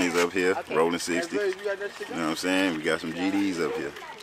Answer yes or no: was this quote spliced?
no